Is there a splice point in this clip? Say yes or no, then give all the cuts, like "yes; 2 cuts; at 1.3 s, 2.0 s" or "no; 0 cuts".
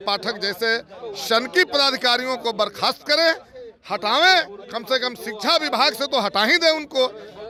no; 0 cuts